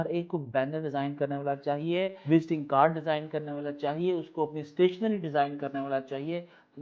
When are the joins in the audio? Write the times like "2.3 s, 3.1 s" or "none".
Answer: none